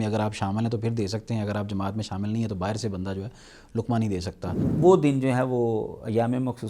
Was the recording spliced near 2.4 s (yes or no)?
no